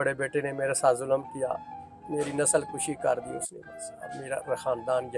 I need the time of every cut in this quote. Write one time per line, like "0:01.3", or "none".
none